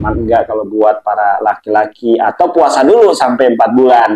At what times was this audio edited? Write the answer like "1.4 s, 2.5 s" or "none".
none